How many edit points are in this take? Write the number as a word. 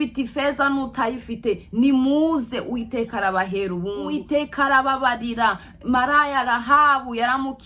one